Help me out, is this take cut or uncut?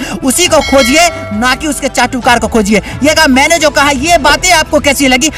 cut